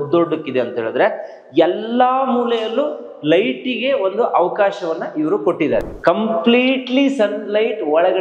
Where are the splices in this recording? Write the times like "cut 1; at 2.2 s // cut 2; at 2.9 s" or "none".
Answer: cut 1; at 5.8 s